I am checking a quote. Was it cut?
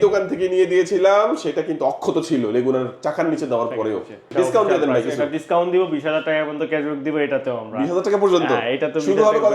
yes; 1 cut; at 4.2 s

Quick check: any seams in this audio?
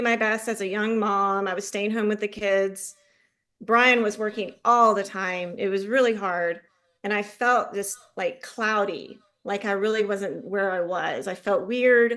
no; 0 cuts

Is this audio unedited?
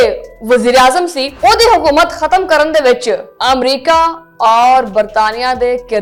yes; 0 cuts

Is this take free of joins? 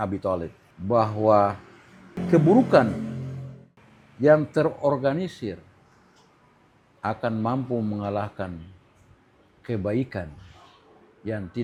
yes; 0 cuts

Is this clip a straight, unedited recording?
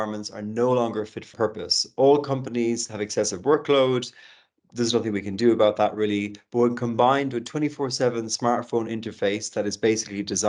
no; 1 cut; at 1.3 s

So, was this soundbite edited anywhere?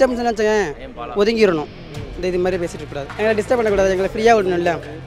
yes; 1 cut; at 3.1 s

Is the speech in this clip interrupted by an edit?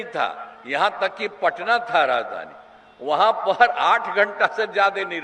no; 0 cuts

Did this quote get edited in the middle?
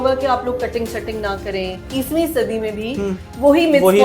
yes; 1 cut; at 1.8 s

